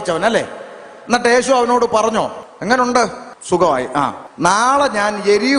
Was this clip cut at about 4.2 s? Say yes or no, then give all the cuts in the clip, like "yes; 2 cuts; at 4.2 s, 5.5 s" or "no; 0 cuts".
yes; 3 cuts; at 2.5 s, 3.3 s, 4.2 s